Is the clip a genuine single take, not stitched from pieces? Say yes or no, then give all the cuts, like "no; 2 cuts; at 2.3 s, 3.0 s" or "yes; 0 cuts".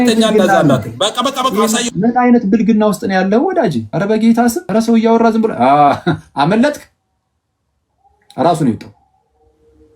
no; 2 cuts; at 3.9 s, 4.6 s